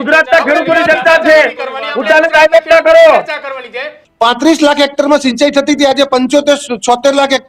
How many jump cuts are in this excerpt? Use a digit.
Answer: 1